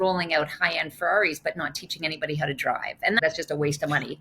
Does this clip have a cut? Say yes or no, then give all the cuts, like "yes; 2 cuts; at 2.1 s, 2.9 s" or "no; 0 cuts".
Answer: yes; 1 cut; at 3.2 s